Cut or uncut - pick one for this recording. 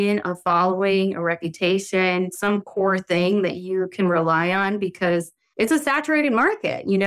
cut